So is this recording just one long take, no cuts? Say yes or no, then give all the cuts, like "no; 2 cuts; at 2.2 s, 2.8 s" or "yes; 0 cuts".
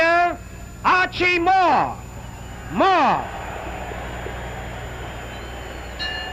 no; 1 cut; at 3.6 s